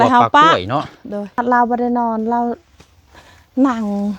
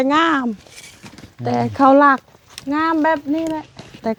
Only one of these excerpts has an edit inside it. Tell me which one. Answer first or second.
first